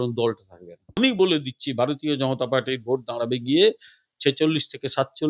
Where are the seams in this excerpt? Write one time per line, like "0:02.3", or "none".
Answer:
0:01.0

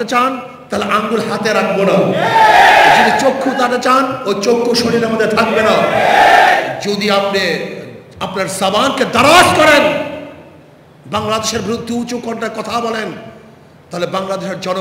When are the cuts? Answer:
none

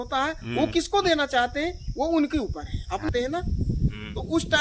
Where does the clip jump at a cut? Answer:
0:03.1

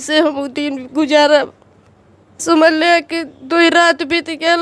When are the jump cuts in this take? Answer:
0:02.4

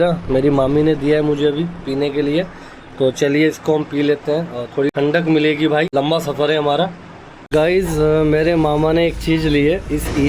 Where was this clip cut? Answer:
0:04.9
0:05.9
0:07.5

